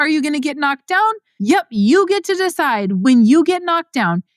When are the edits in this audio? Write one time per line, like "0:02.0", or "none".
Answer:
0:01.3
0:03.0